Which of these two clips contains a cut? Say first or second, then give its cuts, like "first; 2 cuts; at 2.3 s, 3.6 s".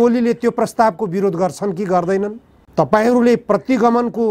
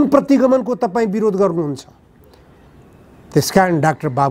first; 1 cut; at 2.6 s